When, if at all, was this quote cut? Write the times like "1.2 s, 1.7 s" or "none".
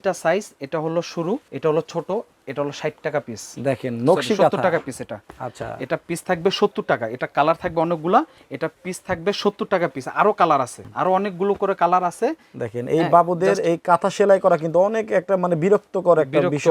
1.5 s, 10.8 s